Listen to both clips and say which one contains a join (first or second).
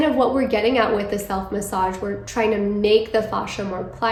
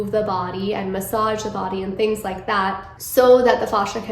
second